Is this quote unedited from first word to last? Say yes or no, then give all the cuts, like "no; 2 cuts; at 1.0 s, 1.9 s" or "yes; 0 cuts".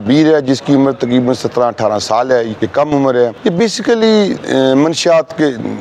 no; 2 cuts; at 2.6 s, 3.4 s